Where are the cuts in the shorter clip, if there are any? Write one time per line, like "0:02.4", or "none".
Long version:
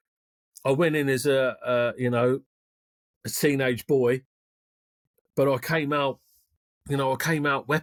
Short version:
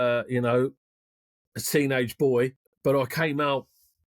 0:02.7